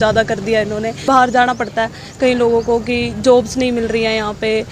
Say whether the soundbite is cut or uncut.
cut